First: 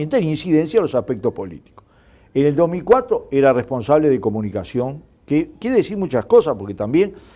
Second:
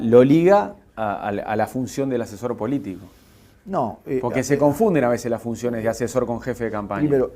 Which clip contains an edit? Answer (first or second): second